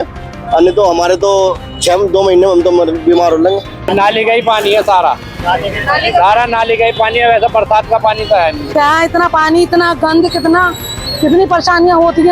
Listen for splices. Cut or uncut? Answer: cut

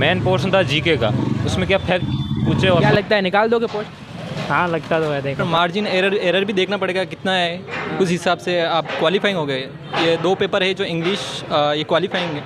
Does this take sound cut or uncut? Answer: cut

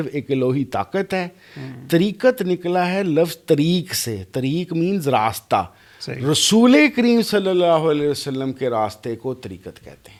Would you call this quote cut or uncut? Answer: uncut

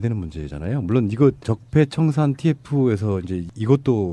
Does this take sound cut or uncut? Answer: uncut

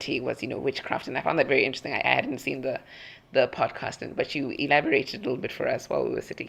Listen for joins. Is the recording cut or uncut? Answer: uncut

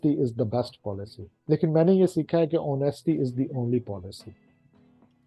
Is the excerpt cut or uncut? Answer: uncut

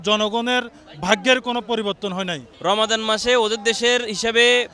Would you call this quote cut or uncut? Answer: cut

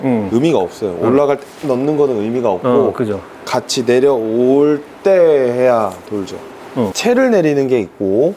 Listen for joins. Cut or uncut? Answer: cut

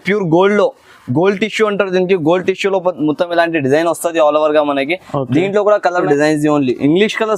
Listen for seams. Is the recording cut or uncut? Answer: cut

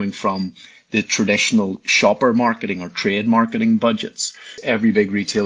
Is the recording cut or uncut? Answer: cut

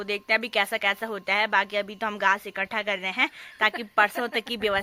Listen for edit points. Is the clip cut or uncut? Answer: uncut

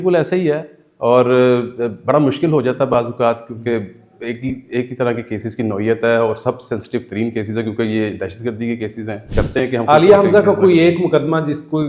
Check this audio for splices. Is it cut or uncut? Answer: cut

